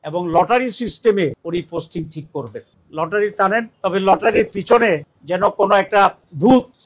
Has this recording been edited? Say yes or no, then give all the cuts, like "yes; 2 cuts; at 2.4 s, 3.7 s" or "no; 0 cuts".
yes; 2 cuts; at 2.8 s, 3.7 s